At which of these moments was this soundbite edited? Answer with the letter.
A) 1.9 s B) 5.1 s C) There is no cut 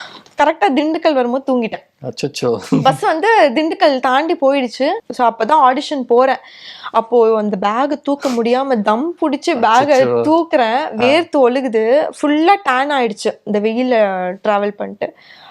B